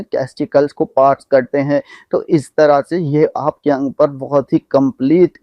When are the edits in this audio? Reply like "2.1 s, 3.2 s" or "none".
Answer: none